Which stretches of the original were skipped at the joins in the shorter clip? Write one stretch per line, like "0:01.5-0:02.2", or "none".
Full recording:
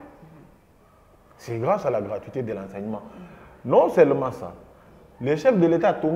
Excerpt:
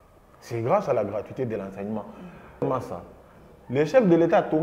0:03.6-0:04.2